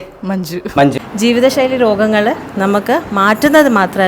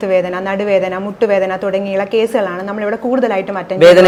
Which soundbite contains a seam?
first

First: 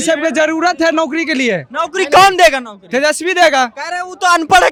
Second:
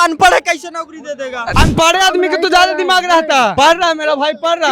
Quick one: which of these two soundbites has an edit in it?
second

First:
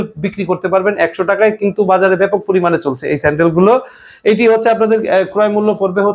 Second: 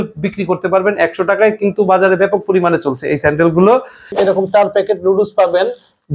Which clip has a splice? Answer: second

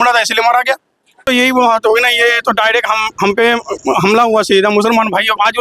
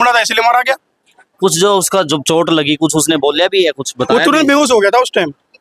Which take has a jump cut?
first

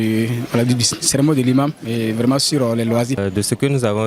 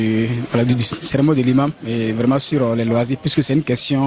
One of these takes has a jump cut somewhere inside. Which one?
first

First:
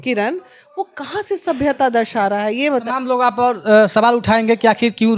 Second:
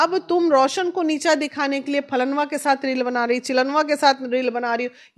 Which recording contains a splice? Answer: first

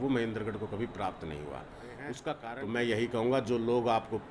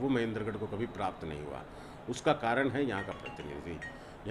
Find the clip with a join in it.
first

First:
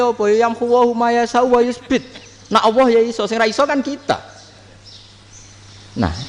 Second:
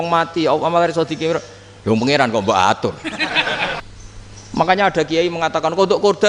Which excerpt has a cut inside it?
second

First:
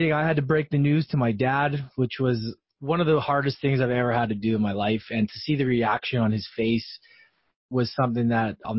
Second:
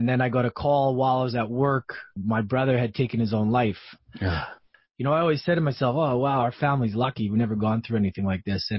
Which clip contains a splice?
second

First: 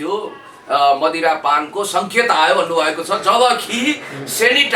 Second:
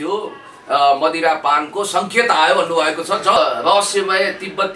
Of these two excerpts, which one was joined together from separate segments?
second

